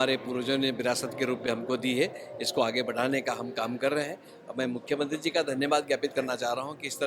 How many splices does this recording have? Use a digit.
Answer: 0